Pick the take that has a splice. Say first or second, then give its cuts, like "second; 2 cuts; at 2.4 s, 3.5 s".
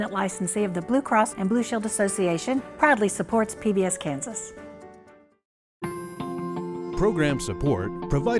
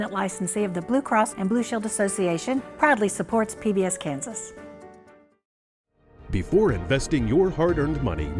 first; 1 cut; at 5.6 s